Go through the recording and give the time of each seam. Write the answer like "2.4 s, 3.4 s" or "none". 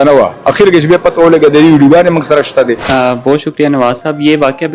2.8 s